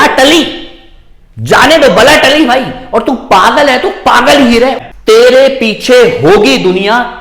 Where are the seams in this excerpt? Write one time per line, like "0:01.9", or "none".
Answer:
0:04.9